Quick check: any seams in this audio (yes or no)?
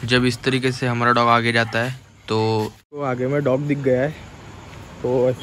yes